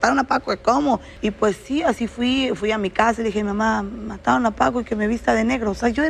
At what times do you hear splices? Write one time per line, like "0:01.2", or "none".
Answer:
0:01.1